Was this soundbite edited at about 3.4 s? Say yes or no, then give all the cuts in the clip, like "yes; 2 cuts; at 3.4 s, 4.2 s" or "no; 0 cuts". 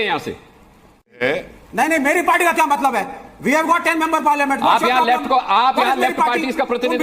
no; 1 cut; at 1.2 s